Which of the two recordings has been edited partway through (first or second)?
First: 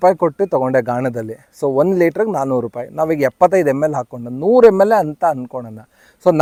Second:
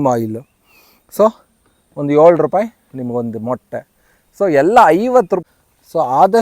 second